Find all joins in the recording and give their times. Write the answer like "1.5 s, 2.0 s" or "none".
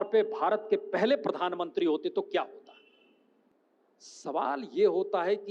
3.5 s